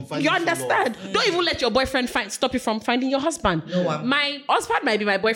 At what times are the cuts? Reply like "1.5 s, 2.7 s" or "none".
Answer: 4.4 s